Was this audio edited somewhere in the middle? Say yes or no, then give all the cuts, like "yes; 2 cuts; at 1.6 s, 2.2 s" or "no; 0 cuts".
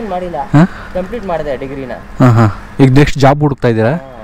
no; 0 cuts